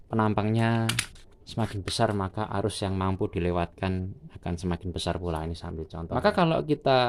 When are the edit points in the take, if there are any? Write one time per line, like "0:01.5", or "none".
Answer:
0:06.0